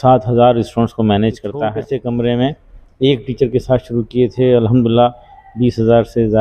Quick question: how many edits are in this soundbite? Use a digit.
1